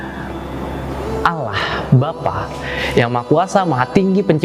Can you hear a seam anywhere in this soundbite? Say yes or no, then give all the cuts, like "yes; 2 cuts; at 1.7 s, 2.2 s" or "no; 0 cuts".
no; 0 cuts